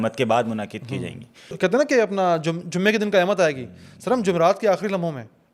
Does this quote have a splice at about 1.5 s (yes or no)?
yes